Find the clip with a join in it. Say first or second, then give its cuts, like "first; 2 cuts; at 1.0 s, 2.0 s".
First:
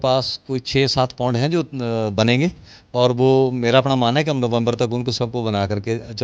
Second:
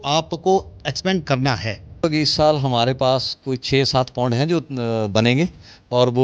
second; 1 cut; at 2.0 s